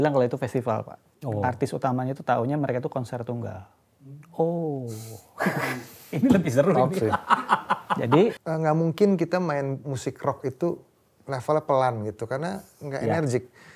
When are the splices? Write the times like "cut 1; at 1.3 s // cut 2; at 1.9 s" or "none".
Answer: cut 1; at 8.4 s